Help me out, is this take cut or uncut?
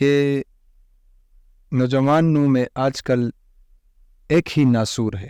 uncut